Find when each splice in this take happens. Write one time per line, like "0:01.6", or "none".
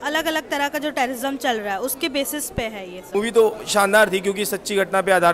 0:03.0